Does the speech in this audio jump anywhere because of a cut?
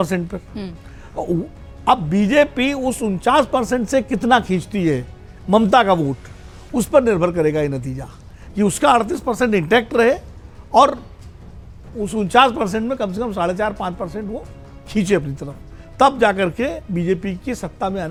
no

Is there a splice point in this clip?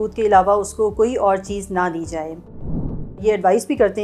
yes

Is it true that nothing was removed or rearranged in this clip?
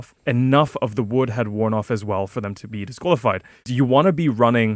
no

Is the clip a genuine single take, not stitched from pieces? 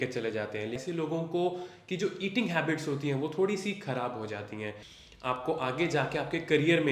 no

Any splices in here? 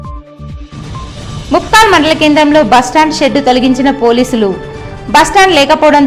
yes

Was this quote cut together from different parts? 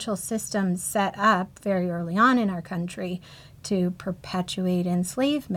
no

